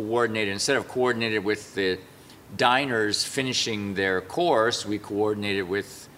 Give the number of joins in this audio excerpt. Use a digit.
0